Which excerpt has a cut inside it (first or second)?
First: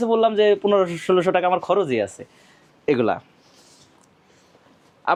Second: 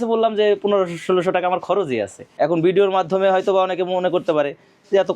second